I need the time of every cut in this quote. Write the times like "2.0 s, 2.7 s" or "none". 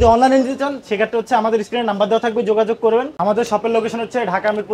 3.1 s